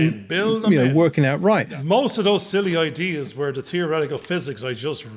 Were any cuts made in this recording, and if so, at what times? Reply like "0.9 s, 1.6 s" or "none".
1.7 s